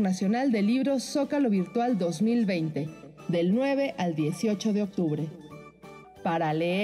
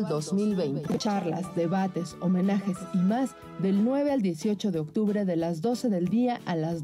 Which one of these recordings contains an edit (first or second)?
second